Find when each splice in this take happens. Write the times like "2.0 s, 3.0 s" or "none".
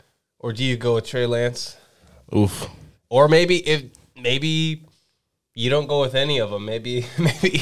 none